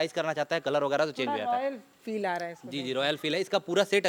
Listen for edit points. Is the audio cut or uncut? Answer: uncut